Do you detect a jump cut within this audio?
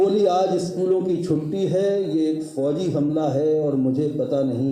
no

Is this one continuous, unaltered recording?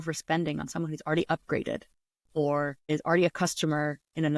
no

